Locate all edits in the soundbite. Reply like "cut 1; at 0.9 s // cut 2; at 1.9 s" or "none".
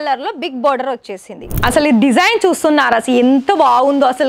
cut 1; at 1.4 s